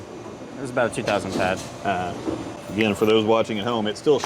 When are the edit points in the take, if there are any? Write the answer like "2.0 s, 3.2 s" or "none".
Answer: 2.6 s